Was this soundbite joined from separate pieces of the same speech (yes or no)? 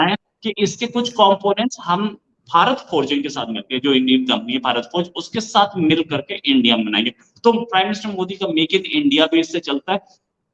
no